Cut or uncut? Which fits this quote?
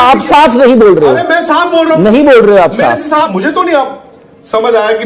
cut